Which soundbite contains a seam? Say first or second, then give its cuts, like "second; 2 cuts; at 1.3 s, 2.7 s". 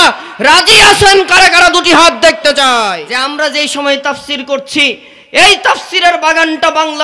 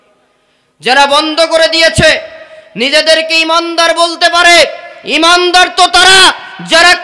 first; 1 cut; at 3.1 s